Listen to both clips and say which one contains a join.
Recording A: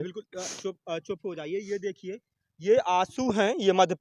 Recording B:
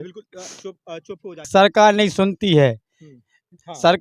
B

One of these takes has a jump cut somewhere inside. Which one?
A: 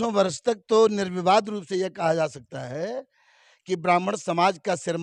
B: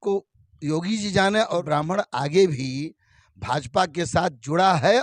B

